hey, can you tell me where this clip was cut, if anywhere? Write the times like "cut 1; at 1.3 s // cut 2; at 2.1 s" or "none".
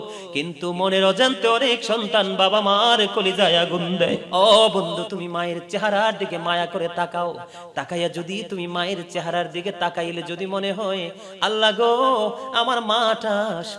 cut 1; at 4.2 s

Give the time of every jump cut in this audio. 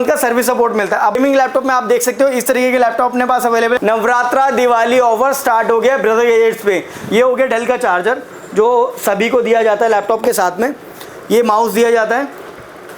cut 1; at 1.2 s // cut 2; at 3.8 s // cut 3; at 6.9 s

